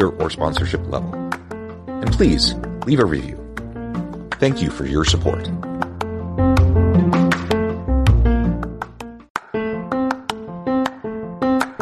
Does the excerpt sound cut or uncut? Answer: cut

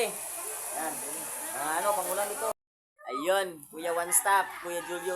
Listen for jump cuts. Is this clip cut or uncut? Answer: cut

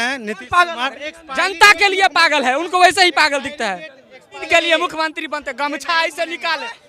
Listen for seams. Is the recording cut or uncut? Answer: cut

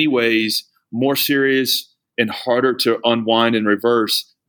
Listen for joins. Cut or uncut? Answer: uncut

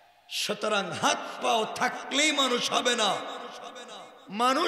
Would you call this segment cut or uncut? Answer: uncut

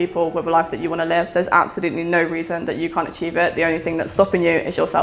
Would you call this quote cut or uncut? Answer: uncut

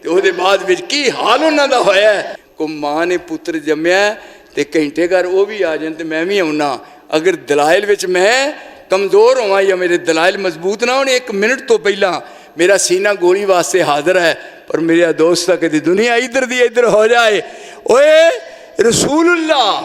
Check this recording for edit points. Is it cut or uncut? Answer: cut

